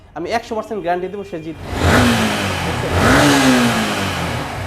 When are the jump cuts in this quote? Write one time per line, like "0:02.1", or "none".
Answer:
0:01.6